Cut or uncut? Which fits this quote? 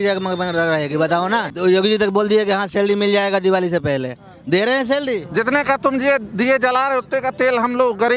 cut